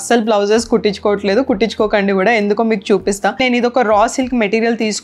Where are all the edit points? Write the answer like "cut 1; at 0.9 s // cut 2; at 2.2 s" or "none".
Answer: cut 1; at 3.4 s